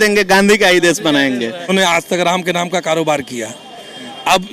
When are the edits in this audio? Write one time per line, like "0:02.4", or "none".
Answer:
0:01.7